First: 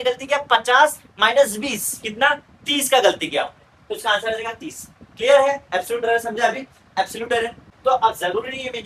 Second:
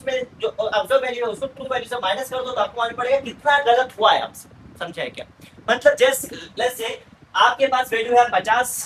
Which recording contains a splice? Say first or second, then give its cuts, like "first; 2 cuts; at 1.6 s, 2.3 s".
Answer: first; 1 cut; at 7.6 s